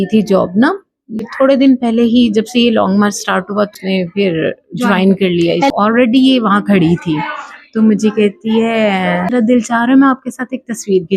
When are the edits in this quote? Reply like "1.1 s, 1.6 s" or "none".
1.3 s, 3.8 s, 5.7 s, 9.3 s